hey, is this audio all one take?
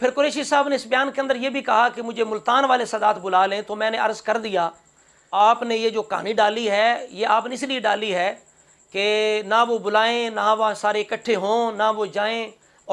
yes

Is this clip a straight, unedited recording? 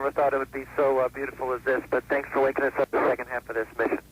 no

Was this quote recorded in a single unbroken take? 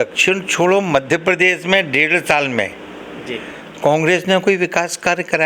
yes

